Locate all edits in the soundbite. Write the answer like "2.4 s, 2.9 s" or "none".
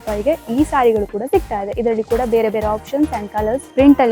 none

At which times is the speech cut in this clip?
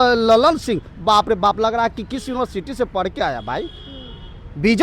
none

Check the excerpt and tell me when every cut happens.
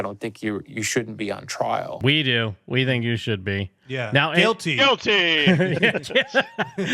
2.0 s

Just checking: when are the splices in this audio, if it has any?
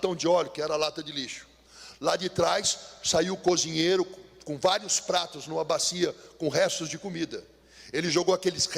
none

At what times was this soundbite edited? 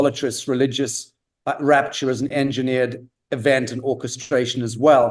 none

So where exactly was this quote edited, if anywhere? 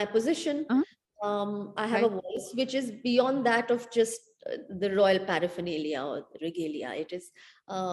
none

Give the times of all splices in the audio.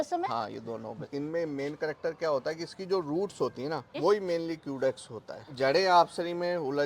1.0 s, 4.0 s, 5.5 s

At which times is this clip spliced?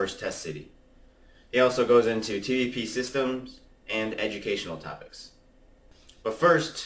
1.8 s

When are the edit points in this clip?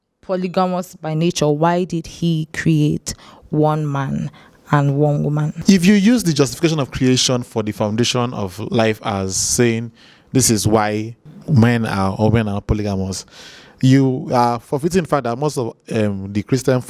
5.5 s

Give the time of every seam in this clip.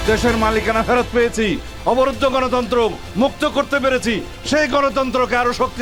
none

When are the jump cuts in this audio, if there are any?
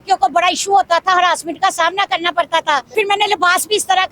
2.9 s

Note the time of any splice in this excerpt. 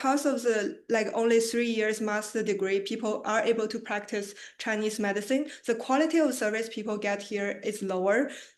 none

